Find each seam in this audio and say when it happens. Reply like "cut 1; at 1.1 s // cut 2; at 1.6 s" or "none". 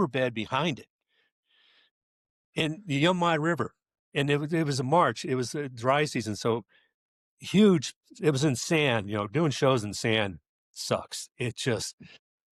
none

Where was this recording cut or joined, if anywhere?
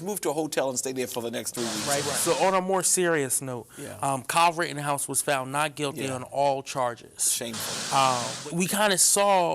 cut 1; at 1.9 s // cut 2; at 8.3 s

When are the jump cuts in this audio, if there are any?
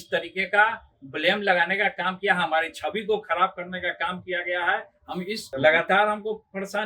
cut 1; at 5.6 s

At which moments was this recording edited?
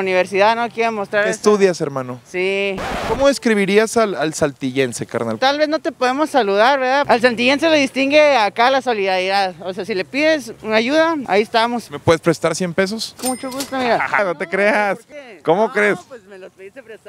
cut 1; at 7.0 s // cut 2; at 11.8 s // cut 3; at 14.2 s // cut 4; at 15.1 s

